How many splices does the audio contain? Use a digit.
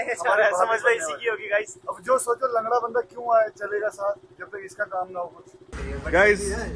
2